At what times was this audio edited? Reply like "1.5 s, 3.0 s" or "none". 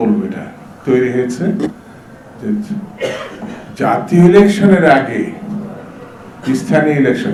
none